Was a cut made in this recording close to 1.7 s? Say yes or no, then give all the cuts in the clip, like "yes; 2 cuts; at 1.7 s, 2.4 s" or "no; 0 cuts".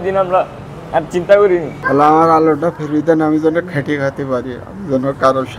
yes; 1 cut; at 1.7 s